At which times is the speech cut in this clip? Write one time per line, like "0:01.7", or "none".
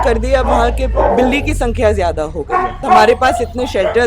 0:02.8